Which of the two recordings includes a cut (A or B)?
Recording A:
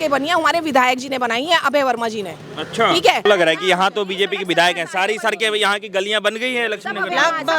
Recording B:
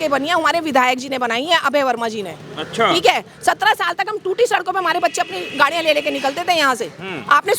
A